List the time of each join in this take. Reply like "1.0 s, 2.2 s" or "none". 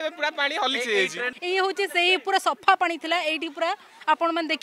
1.3 s